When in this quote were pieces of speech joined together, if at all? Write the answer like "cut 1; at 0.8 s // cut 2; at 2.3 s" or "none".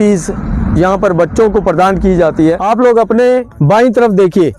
cut 1; at 2.6 s